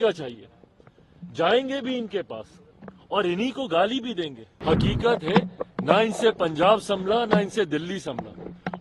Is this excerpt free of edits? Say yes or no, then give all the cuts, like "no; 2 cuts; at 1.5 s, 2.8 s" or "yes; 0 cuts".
no; 1 cut; at 4.4 s